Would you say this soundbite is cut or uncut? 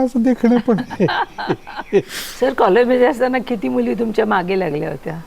cut